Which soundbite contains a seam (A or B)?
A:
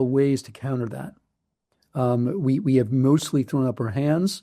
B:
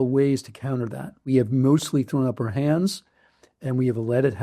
B